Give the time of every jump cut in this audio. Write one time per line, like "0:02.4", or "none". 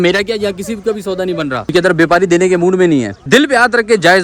0:01.7
0:03.2